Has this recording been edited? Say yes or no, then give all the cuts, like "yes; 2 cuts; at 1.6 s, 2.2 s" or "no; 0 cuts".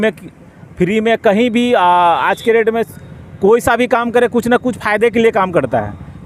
no; 0 cuts